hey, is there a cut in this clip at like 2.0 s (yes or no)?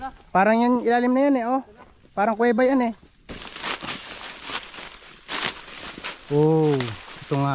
no